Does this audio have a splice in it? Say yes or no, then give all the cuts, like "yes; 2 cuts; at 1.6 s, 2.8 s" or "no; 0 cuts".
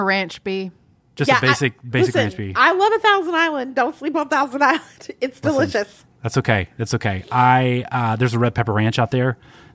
no; 0 cuts